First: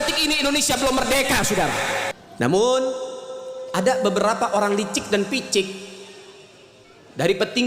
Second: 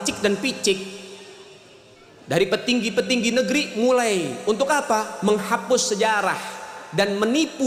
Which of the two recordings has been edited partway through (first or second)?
first